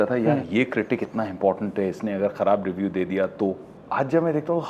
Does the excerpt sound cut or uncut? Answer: uncut